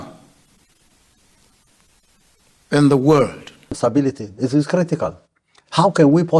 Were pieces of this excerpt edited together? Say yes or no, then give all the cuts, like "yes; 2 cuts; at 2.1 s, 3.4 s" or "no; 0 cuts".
yes; 1 cut; at 3.8 s